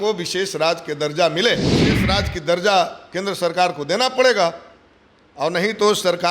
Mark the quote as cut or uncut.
cut